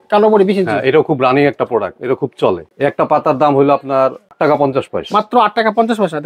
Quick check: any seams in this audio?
yes; 2 cuts; at 2.7 s, 4.3 s

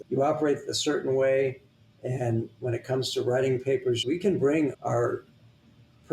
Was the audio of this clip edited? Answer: yes; 1 cut; at 4.0 s

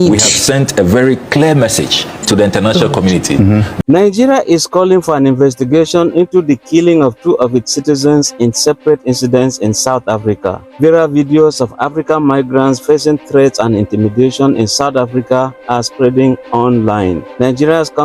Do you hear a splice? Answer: yes; 1 cut; at 3.7 s

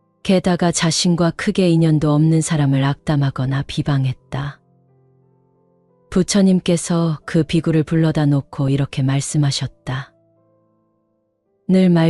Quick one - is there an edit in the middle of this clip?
no; 0 cuts

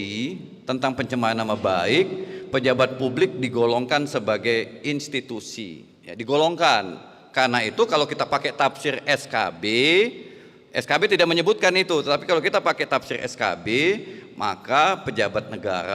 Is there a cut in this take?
no; 0 cuts

